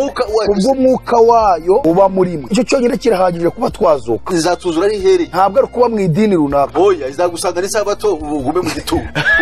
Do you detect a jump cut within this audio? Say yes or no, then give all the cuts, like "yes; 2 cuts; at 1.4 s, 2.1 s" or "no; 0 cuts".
no; 0 cuts